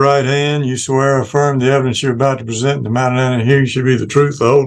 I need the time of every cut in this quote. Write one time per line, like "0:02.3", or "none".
none